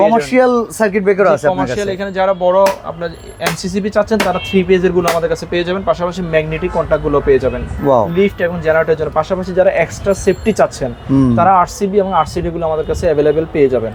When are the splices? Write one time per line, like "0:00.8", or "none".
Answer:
none